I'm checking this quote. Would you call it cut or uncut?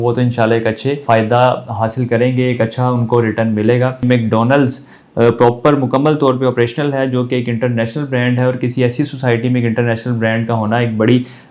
cut